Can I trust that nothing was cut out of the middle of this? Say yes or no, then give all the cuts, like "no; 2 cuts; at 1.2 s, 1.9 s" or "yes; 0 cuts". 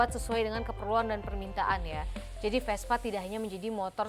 yes; 0 cuts